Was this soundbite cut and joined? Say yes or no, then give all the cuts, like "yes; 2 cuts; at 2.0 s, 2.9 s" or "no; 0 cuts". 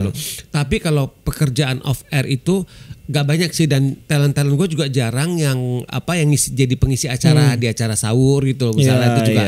no; 0 cuts